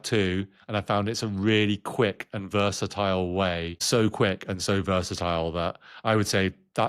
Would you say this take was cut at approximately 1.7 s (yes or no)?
no